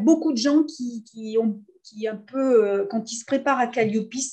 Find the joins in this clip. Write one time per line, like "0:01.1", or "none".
none